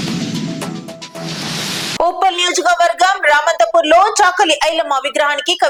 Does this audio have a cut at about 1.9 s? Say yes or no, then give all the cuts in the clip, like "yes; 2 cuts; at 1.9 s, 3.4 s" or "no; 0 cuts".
no; 0 cuts